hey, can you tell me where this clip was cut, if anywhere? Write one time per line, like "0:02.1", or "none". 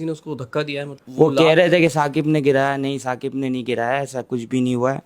0:01.0